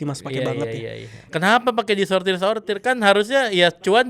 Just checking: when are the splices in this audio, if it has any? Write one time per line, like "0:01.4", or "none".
0:01.3